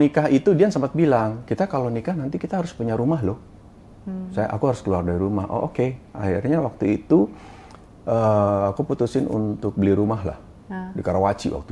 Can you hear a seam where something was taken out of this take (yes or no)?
no